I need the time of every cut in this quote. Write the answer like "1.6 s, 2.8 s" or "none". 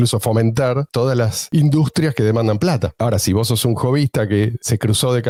none